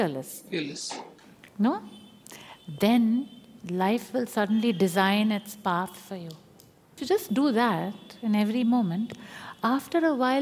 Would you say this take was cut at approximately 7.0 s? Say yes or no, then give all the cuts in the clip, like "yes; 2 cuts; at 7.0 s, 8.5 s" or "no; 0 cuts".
yes; 1 cut; at 7.0 s